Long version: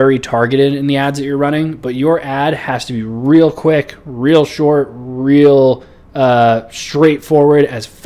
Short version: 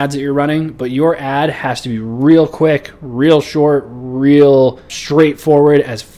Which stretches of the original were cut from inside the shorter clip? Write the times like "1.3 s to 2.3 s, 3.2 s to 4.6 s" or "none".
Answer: 6.0 s to 6.8 s